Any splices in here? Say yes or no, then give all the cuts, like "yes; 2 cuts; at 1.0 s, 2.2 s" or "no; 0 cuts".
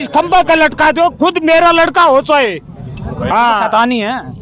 no; 0 cuts